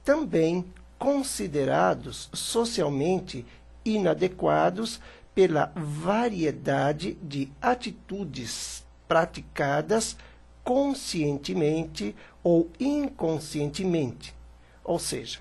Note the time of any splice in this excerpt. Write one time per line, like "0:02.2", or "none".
none